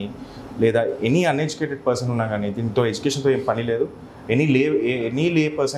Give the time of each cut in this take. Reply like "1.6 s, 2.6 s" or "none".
none